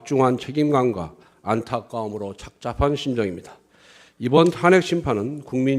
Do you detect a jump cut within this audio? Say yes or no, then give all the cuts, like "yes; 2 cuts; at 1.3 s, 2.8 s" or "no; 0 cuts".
yes; 1 cut; at 1.8 s